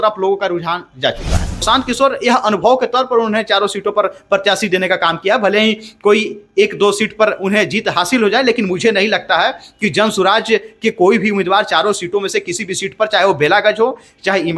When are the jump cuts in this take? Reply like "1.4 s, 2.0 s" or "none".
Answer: 1.6 s